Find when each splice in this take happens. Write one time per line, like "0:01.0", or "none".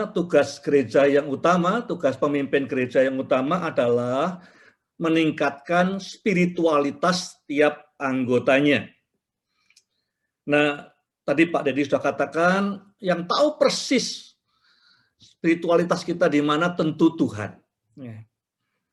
none